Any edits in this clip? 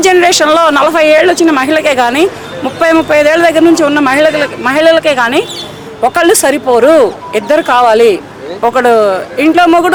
no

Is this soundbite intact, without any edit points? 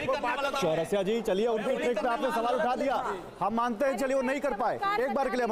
yes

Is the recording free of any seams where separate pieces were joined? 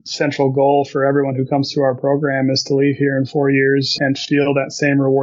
no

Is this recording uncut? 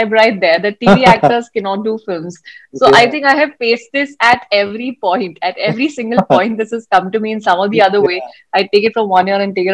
yes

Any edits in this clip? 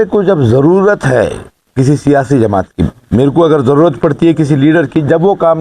yes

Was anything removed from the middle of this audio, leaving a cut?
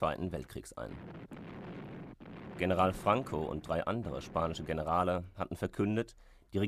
no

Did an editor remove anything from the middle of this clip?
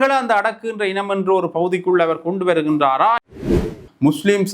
yes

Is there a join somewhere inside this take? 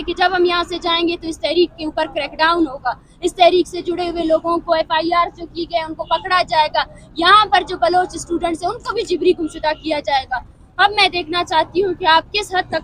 no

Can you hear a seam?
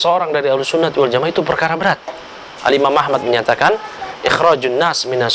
no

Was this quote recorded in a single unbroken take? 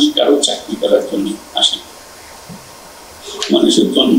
yes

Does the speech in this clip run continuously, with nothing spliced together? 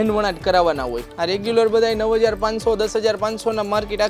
no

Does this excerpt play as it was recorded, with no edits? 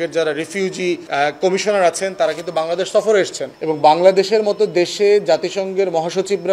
no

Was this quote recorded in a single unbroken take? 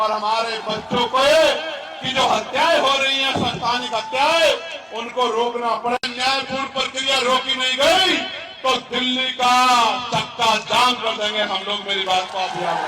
no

